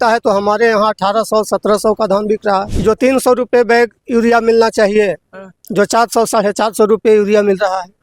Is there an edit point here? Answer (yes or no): yes